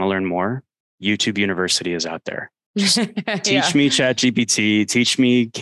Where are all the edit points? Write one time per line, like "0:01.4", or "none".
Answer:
none